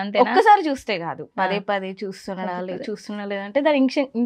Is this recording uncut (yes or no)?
yes